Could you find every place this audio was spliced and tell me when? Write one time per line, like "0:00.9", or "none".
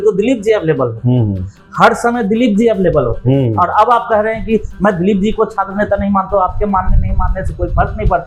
none